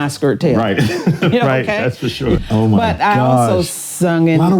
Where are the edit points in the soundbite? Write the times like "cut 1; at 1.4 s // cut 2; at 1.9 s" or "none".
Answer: cut 1; at 2.4 s